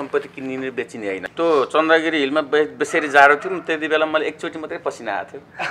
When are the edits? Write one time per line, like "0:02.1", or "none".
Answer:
0:01.2